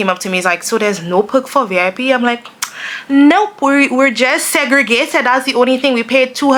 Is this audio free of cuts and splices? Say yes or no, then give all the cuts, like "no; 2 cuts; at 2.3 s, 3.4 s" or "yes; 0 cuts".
yes; 0 cuts